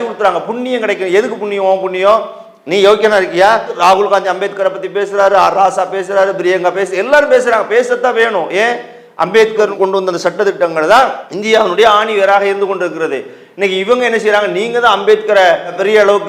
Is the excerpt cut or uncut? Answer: uncut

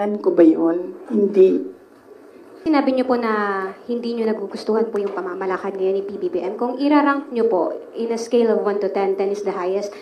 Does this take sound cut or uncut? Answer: cut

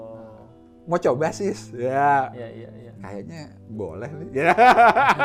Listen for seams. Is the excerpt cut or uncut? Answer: uncut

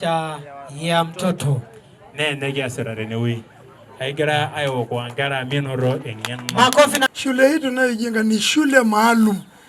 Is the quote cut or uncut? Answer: cut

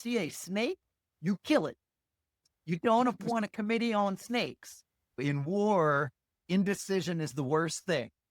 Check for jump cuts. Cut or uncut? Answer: cut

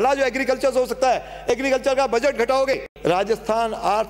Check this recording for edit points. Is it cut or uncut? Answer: cut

